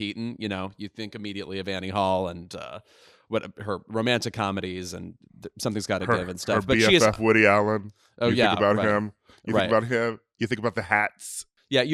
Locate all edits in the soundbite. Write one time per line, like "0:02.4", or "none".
none